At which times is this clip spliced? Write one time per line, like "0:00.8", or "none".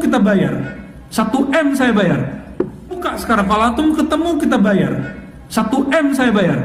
0:03.0